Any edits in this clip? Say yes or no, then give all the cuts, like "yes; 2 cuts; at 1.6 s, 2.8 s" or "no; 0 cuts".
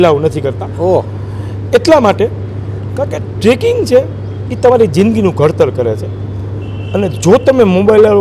no; 0 cuts